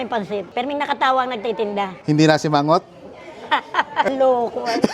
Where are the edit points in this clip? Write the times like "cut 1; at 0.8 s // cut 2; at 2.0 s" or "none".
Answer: cut 1; at 4.1 s

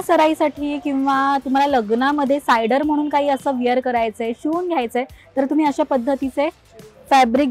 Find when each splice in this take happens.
none

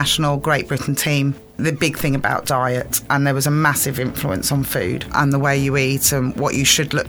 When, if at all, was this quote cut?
cut 1; at 1.6 s // cut 2; at 5.1 s

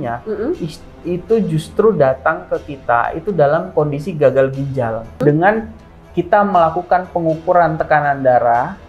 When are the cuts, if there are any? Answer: cut 1; at 5.2 s

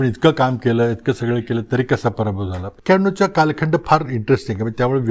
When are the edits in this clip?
cut 1; at 2.7 s

